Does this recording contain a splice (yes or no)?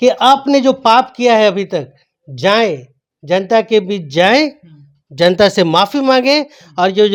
no